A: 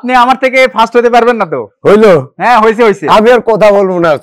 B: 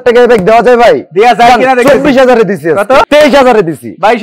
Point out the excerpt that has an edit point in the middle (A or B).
B